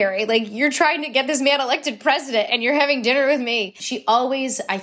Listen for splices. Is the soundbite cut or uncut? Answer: cut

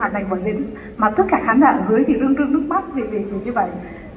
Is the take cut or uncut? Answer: uncut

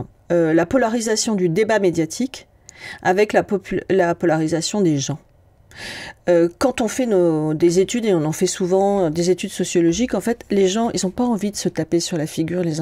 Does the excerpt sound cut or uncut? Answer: uncut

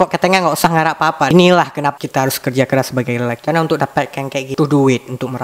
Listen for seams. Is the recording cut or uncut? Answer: cut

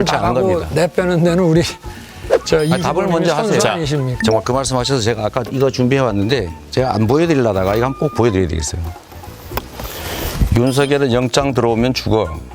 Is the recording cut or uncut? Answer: cut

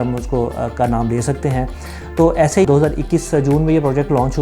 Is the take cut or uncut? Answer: cut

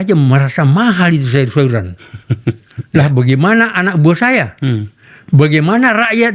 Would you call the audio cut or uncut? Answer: uncut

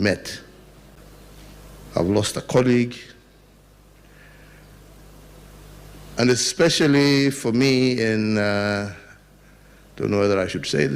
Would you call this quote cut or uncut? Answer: cut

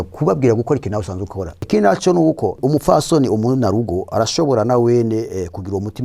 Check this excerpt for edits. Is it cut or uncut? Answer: cut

